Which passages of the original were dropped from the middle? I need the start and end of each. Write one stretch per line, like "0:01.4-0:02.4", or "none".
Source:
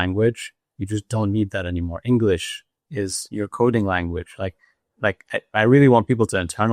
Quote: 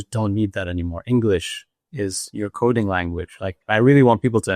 0:04.6-0:05.5